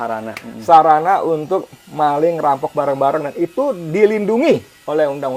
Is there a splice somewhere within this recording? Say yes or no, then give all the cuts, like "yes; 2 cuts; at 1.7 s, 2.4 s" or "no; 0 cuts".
no; 0 cuts